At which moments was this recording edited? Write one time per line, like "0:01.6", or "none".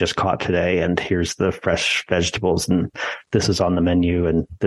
none